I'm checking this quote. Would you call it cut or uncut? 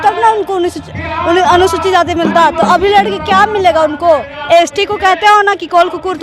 cut